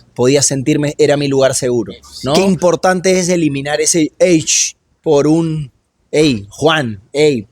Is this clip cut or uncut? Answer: cut